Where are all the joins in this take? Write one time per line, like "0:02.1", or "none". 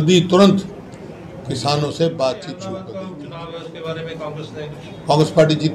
0:02.6